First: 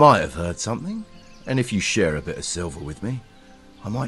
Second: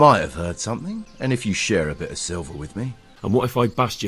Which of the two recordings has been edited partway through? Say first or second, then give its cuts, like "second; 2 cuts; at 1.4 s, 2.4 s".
second; 2 cuts; at 1.0 s, 3.2 s